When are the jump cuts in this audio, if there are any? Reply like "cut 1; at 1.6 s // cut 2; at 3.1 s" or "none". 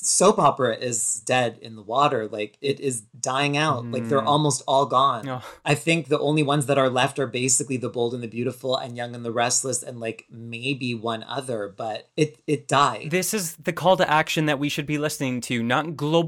cut 1; at 1.1 s